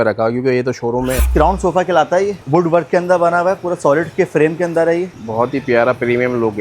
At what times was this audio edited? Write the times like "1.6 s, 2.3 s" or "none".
1.2 s, 2.4 s, 5.1 s